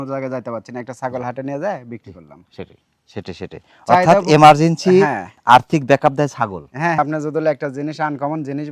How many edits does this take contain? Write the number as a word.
one